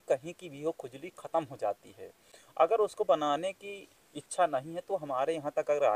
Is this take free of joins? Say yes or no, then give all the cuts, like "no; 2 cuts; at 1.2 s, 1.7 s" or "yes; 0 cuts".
yes; 0 cuts